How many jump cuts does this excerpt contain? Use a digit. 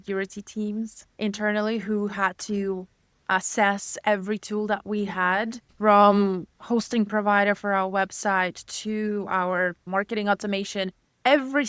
3